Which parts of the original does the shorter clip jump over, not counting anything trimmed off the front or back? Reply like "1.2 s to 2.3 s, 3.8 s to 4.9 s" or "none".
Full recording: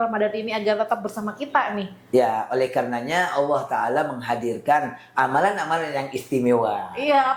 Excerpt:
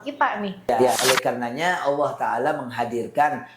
2.3 s to 2.5 s